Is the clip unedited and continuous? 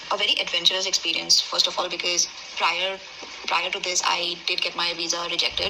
yes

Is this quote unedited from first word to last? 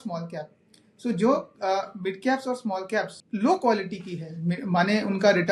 no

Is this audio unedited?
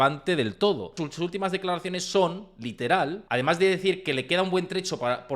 no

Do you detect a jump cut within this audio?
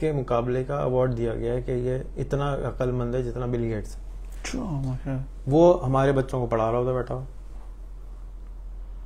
no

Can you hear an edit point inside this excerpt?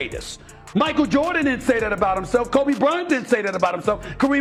no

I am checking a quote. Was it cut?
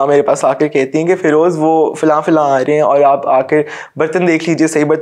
no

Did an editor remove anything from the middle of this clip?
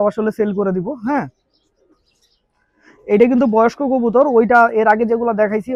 no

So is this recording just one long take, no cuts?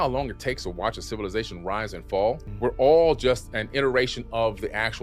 no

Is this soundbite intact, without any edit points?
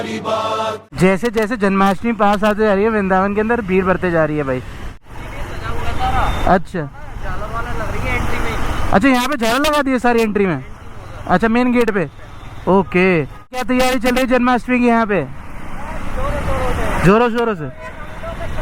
no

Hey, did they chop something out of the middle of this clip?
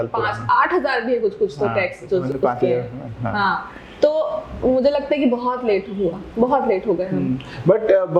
no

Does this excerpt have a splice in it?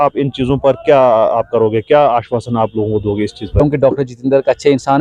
yes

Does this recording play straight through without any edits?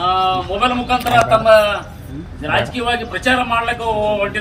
yes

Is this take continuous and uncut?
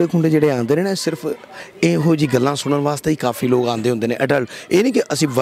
yes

